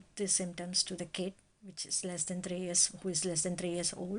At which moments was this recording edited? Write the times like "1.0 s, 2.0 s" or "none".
none